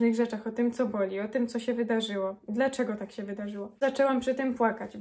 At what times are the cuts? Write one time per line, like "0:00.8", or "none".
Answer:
0:03.8